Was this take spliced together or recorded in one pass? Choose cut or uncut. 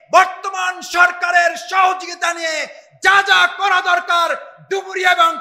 uncut